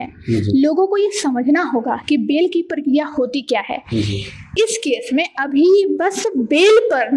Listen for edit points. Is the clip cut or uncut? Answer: cut